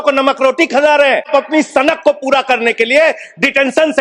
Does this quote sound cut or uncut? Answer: cut